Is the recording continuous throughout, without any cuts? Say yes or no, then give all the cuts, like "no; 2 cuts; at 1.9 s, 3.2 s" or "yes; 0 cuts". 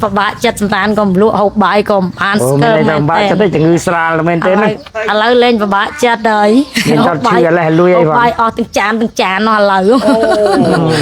yes; 0 cuts